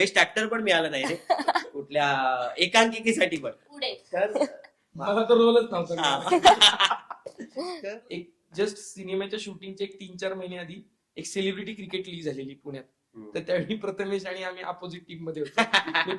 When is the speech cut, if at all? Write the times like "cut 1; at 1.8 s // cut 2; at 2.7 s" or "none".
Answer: cut 1; at 8.0 s